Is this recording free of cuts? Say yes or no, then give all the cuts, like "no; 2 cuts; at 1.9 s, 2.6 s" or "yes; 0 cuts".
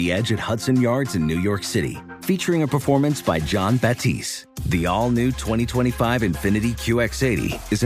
yes; 0 cuts